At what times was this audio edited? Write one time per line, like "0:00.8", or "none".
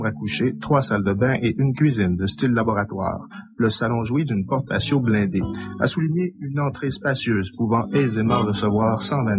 0:08.4

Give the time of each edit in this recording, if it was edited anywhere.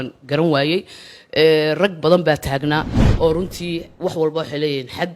0:03.0

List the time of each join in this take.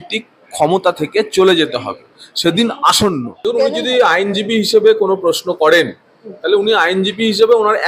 0:03.3

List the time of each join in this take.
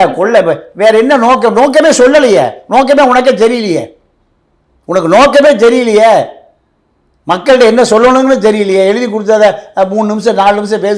none

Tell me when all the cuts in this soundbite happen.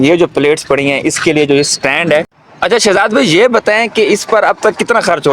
0:02.4

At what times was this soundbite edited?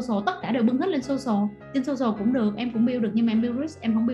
0:01.6

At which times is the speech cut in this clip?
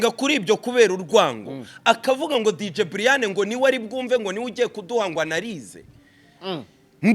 none

